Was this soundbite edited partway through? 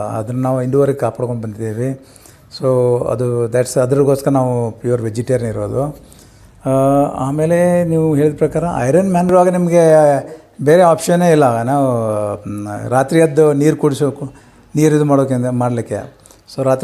yes; 1 cut; at 9.3 s

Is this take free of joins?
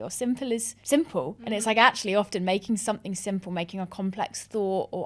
yes; 0 cuts

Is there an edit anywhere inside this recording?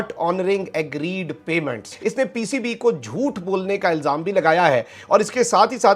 yes; 1 cut; at 1.9 s

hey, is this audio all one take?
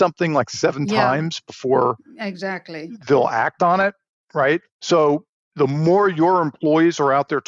yes; 0 cuts

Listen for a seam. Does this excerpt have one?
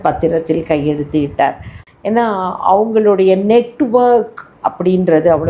yes; 1 cut; at 1.8 s

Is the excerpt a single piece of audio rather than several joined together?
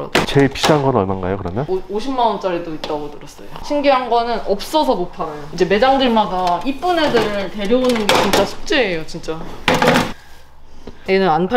no; 3 cuts; at 1.7 s, 3.5 s, 5.4 s

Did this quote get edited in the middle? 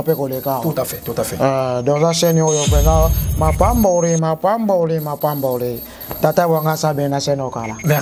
no; 0 cuts

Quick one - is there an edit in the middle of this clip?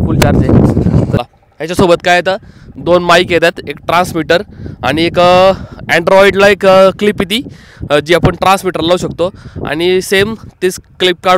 yes; 1 cut; at 1.2 s

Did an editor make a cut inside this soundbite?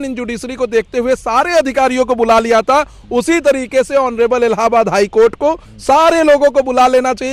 no; 0 cuts

